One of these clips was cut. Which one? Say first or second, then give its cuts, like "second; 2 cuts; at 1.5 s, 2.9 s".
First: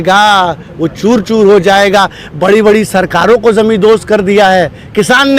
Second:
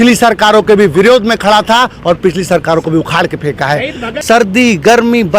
second; 1 cut; at 4.1 s